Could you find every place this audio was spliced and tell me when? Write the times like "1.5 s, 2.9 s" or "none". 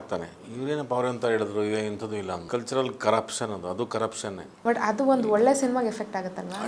2.5 s, 4.5 s